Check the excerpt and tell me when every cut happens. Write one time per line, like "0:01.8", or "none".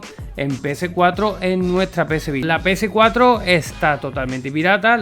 0:02.4

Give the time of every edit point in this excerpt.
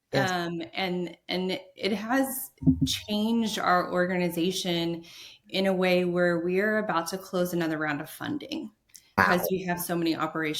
0:09.2

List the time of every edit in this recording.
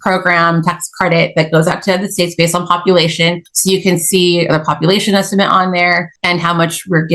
0:03.5
0:06.1

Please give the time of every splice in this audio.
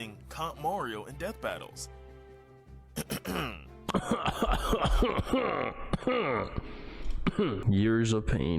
0:07.6

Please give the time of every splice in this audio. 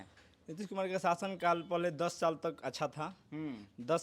0:01.4

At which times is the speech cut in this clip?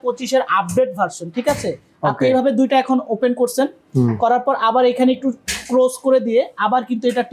none

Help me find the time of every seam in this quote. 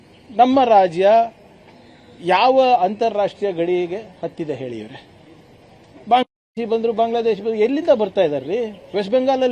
none

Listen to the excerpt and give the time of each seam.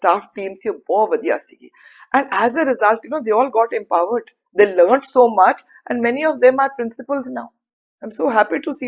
none

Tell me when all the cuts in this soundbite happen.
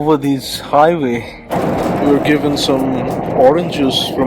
0:01.4

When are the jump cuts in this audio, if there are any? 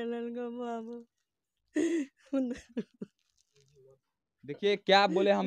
none

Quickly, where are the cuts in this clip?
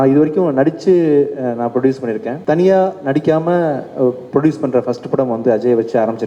0:02.3

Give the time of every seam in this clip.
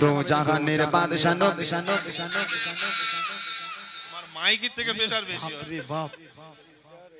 none

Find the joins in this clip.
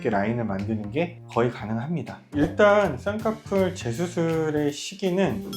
0:02.2

